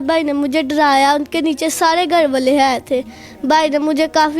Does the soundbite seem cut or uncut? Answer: uncut